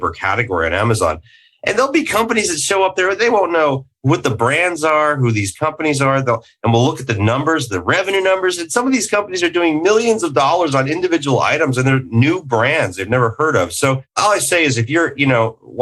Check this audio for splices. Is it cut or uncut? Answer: cut